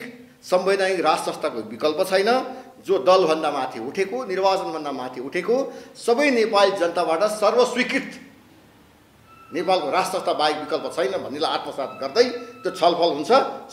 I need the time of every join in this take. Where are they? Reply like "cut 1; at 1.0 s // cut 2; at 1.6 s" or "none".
none